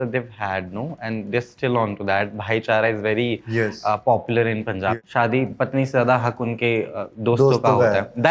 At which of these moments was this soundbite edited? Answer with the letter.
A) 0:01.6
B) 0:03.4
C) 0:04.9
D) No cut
C